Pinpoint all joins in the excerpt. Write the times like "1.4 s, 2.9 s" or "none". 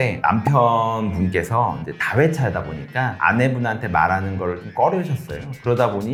none